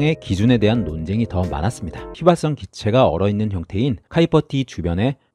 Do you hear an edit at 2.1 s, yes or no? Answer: yes